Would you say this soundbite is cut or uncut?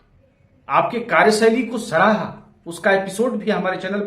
uncut